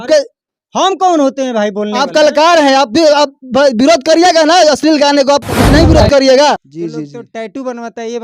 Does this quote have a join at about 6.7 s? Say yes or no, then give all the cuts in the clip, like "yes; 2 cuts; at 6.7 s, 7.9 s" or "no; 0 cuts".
yes; 1 cut; at 6.7 s